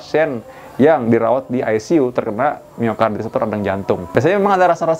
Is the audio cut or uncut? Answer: cut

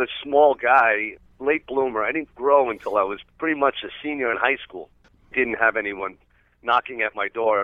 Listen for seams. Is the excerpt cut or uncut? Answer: cut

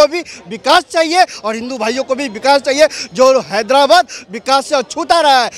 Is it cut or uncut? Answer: uncut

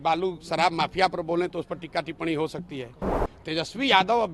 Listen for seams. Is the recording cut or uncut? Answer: cut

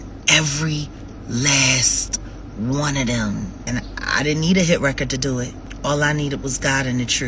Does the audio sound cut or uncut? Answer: uncut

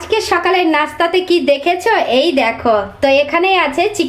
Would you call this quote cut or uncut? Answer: uncut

